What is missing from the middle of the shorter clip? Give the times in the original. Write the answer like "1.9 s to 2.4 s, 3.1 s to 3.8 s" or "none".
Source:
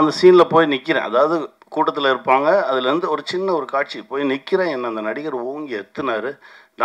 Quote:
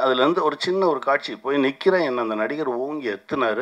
none